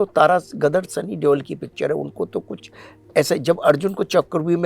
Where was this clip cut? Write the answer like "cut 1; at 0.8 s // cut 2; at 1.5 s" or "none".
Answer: none